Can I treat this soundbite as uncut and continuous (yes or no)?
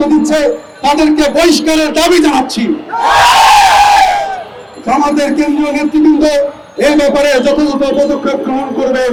yes